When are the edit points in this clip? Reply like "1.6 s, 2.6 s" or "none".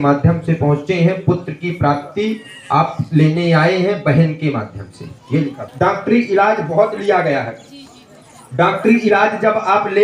5.6 s